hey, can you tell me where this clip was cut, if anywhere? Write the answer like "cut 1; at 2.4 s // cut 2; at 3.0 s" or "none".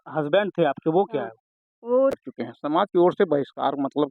cut 1; at 2.1 s